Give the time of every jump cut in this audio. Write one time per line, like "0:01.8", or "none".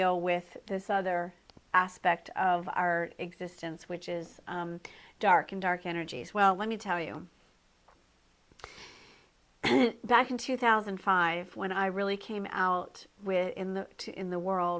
0:13.5